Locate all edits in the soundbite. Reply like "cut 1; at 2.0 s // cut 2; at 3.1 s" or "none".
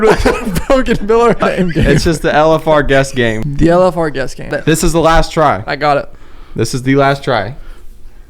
cut 1; at 1.4 s // cut 2; at 3.4 s // cut 3; at 4.5 s